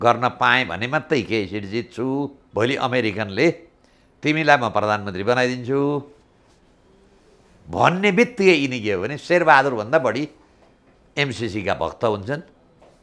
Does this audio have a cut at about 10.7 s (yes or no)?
no